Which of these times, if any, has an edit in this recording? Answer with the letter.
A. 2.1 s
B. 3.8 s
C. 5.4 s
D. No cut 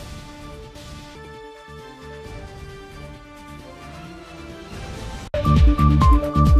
D